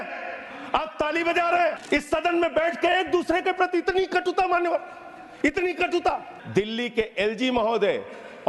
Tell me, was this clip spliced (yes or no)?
yes